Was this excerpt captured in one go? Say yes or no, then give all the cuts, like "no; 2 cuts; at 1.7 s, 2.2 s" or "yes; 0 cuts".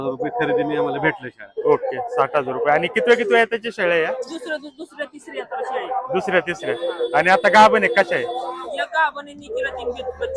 yes; 0 cuts